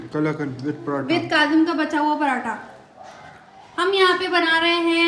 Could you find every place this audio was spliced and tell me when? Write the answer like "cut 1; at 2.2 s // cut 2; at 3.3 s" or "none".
none